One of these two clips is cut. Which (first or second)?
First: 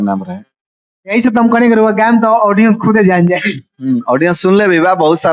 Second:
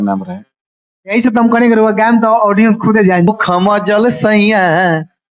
second